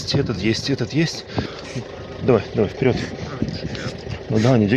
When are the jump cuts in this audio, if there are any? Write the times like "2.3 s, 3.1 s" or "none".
1.5 s